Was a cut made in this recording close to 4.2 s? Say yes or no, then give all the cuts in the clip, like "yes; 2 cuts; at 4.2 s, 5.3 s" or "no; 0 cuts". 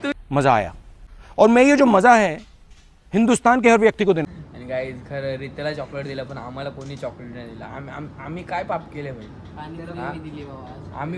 yes; 1 cut; at 4.2 s